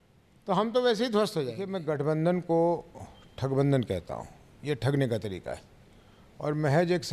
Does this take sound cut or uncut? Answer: cut